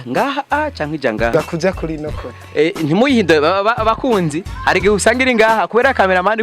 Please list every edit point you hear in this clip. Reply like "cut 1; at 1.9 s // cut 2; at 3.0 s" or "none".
cut 1; at 1.3 s